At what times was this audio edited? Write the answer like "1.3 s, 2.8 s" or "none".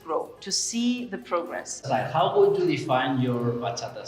1.8 s